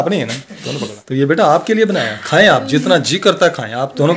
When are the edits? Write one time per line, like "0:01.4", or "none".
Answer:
0:00.9